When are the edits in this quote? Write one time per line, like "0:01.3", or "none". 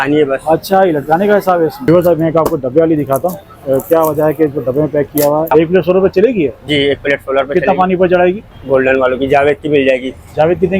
0:01.9
0:05.5
0:08.5